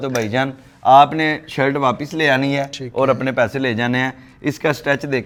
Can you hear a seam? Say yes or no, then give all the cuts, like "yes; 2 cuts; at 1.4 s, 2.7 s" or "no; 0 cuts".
no; 0 cuts